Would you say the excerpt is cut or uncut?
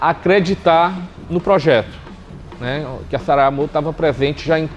uncut